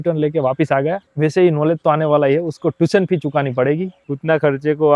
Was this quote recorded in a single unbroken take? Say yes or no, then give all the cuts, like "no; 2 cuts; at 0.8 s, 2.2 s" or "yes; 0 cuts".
no; 2 cuts; at 1.1 s, 4.0 s